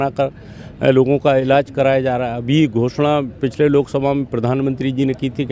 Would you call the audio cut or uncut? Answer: uncut